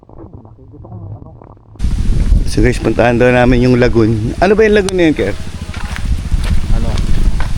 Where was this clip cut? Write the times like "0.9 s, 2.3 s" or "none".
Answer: 1.8 s

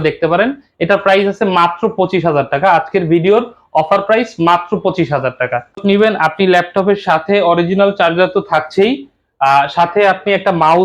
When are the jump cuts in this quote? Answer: 5.8 s

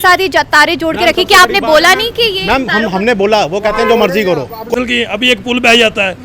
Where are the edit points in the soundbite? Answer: 4.7 s

